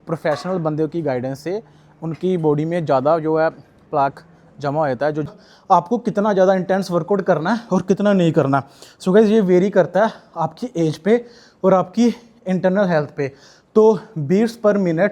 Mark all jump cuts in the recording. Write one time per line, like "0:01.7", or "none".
0:05.3